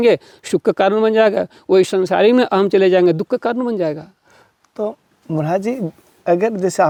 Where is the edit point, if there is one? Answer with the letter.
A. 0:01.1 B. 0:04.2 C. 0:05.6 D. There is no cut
D